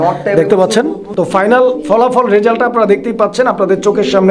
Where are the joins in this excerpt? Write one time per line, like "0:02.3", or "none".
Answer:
0:01.5